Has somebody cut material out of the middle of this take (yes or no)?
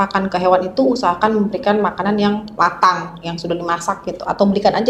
no